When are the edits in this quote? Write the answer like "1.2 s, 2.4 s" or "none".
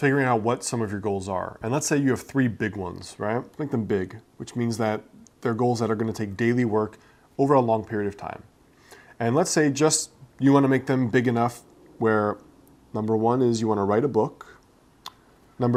none